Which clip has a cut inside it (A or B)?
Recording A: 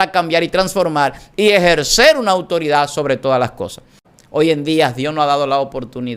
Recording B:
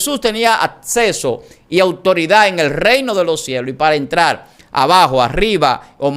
A